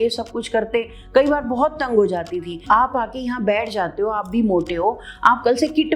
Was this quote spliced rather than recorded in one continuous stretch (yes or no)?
yes